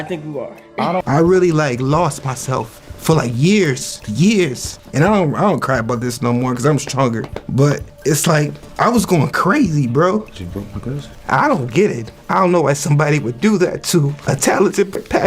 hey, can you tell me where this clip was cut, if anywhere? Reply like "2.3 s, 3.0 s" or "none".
1.0 s, 10.3 s